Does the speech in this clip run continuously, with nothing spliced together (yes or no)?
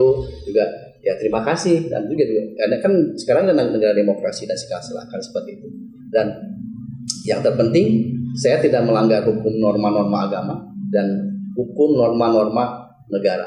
yes